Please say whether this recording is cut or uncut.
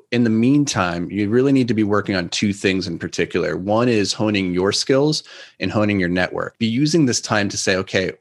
cut